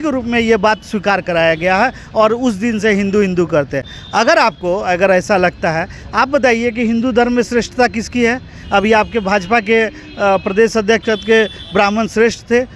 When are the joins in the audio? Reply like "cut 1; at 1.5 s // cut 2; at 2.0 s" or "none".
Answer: none